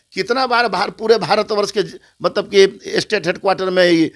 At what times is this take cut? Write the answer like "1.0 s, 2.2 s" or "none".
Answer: none